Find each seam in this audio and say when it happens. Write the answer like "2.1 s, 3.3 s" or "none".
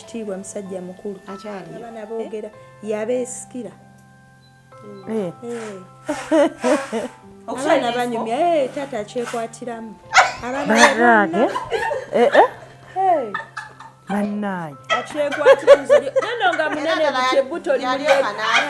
1.9 s